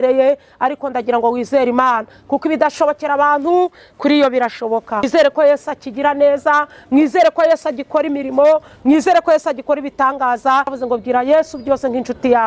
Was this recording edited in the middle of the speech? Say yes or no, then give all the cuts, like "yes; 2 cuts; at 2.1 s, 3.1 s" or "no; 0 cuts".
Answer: yes; 2 cuts; at 5.1 s, 10.8 s